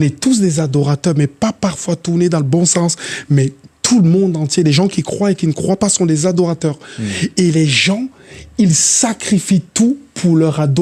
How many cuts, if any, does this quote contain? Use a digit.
1